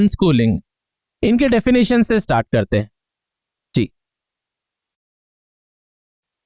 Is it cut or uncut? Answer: uncut